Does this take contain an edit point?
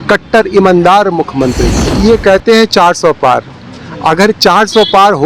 yes; 1 cut; at 1.8 s

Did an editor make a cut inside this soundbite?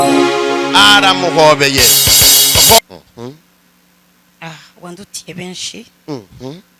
yes; 1 cut; at 2.8 s

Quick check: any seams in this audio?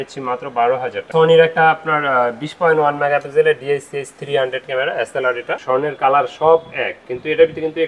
yes; 2 cuts; at 1.1 s, 5.6 s

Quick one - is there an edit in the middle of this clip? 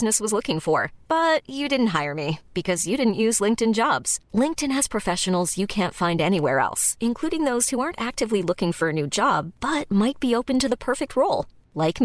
no; 0 cuts

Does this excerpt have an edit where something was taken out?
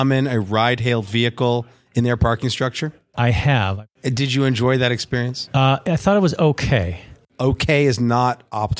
yes; 4 cuts; at 3.0 s, 3.9 s, 5.4 s, 7.2 s

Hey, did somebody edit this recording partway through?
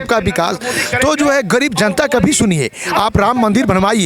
no; 0 cuts

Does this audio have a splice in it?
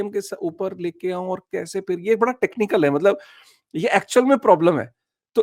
no; 0 cuts

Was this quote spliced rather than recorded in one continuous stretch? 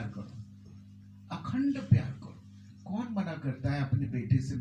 no; 0 cuts

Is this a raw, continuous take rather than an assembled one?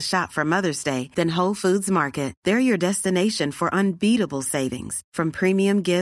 yes; 0 cuts

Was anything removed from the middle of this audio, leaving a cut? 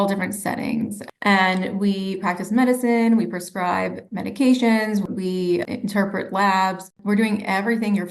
yes; 1 cut; at 6.9 s

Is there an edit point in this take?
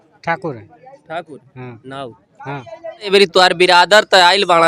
yes; 1 cut; at 3.1 s

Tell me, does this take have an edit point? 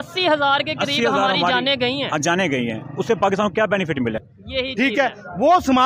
yes; 1 cut; at 4.2 s

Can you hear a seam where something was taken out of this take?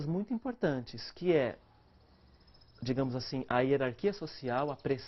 no; 0 cuts

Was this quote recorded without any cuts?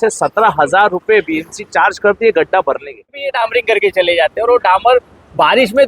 no; 1 cut; at 3.3 s

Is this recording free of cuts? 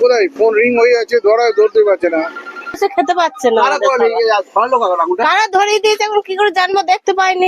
no; 1 cut; at 2.8 s

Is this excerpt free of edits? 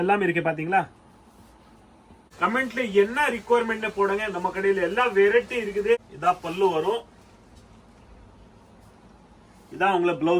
no; 2 cuts; at 2.2 s, 6.1 s

